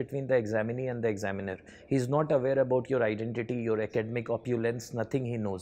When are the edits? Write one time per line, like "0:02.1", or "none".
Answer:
none